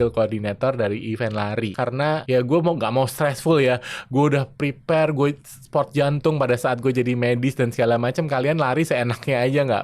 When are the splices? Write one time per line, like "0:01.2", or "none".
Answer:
0:01.9